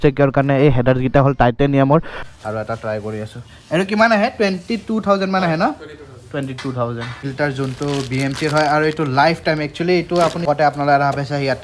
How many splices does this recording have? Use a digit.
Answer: 3